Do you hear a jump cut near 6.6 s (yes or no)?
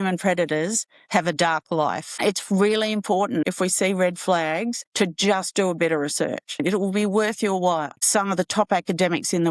yes